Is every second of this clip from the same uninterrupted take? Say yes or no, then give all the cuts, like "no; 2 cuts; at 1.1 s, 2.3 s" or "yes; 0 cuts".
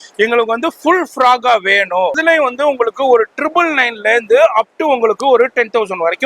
no; 1 cut; at 2.2 s